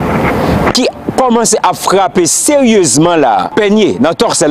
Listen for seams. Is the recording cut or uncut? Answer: cut